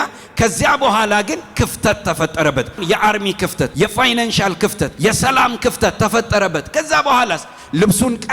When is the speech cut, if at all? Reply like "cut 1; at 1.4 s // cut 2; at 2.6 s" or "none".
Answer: cut 1; at 2.8 s // cut 2; at 3.7 s // cut 3; at 4.9 s

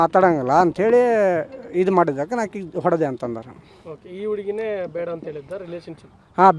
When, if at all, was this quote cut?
none

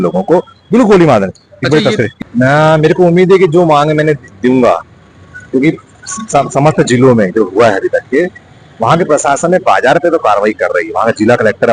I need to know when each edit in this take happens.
cut 1; at 2.1 s

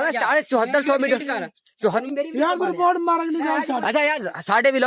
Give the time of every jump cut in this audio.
cut 1; at 2.1 s

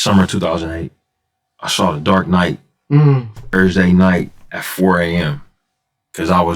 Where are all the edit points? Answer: cut 1; at 3.5 s

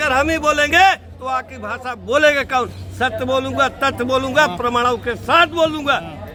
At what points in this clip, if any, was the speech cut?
none

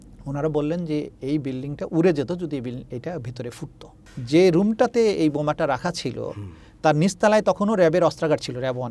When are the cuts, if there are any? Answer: cut 1; at 4.1 s

